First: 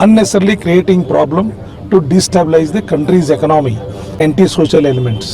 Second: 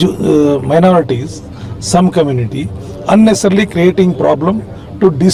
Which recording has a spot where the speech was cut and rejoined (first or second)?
first